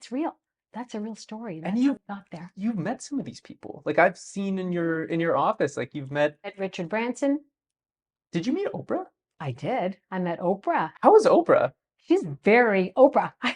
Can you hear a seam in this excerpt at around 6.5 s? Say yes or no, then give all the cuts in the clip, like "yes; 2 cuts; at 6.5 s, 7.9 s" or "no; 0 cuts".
yes; 1 cut; at 6.5 s